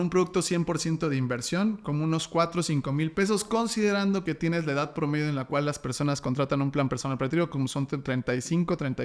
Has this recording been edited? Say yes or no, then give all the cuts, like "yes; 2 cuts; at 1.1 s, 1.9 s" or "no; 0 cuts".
no; 0 cuts